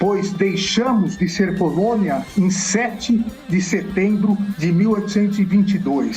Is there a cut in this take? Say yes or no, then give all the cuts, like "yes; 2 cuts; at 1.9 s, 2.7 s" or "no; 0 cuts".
yes; 2 cuts; at 2.3 s, 4.6 s